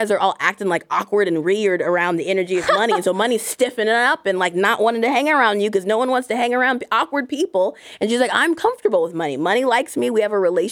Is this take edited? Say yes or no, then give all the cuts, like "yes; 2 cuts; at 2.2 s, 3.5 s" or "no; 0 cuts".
no; 0 cuts